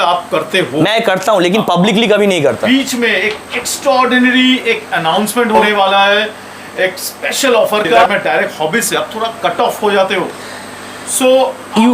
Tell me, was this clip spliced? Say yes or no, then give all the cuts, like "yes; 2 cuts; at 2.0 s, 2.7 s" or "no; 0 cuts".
yes; 3 cuts; at 2.6 s, 5.7 s, 8.0 s